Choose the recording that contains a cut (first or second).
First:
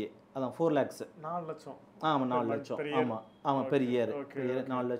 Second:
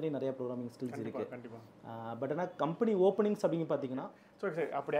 second